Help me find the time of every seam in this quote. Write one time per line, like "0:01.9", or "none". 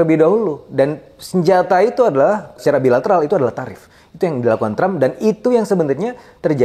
0:02.6